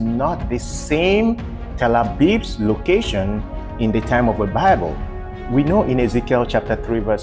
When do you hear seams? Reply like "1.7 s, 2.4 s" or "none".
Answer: none